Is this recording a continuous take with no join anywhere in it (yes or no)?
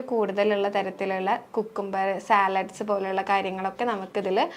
yes